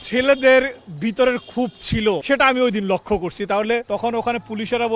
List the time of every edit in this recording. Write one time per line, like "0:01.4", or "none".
0:03.8